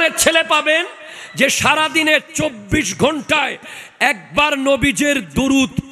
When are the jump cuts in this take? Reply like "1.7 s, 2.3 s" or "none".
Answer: none